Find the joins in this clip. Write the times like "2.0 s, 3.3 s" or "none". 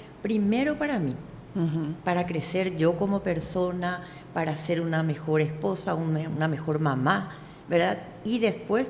none

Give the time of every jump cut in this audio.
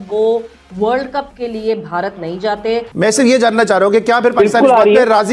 2.9 s

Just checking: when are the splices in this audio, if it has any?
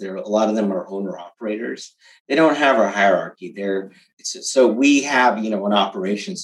none

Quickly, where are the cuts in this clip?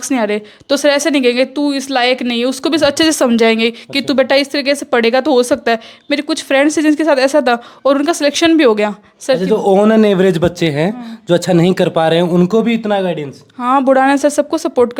none

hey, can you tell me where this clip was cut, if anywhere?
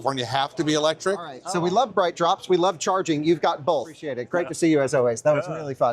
1.4 s, 4.1 s

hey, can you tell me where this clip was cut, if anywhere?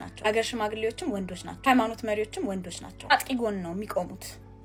none

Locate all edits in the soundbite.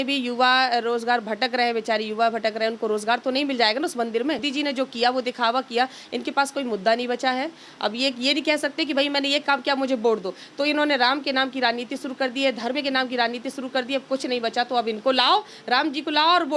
4.5 s

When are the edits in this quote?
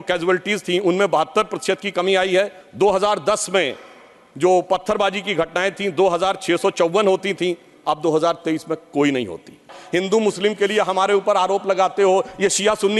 2.6 s, 9.8 s

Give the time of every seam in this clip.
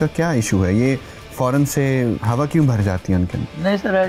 2.2 s

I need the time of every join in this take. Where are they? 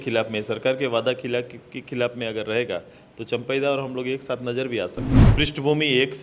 5.2 s

